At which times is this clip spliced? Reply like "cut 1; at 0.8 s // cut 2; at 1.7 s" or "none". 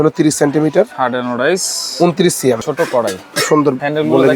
cut 1; at 2.6 s

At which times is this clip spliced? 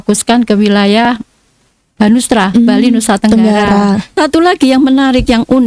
cut 1; at 4.2 s

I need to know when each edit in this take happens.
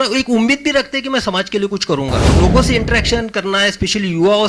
cut 1; at 2.3 s

